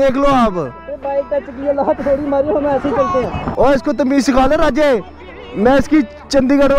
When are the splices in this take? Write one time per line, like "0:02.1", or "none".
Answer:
0:03.4